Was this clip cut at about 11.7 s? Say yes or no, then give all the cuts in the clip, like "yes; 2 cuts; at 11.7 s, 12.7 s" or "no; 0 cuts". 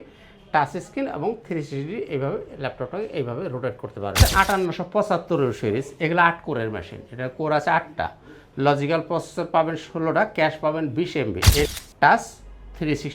yes; 2 cuts; at 4.2 s, 11.7 s